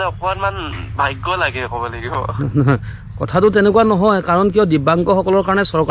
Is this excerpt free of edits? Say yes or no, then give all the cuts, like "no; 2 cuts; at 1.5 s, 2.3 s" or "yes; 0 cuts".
yes; 0 cuts